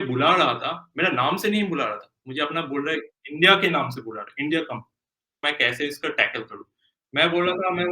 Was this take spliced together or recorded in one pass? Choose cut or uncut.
cut